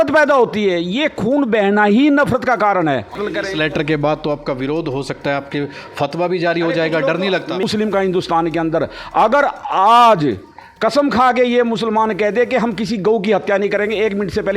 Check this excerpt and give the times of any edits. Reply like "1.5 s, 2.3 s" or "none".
3.2 s, 7.6 s